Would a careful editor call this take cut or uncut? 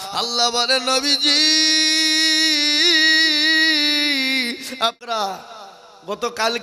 cut